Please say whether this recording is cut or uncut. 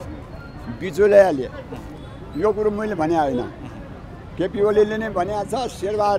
uncut